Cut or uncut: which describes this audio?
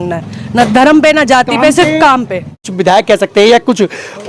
cut